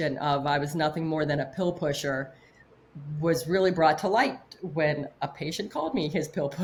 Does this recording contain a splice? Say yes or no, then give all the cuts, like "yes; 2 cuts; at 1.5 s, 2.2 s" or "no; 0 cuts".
no; 0 cuts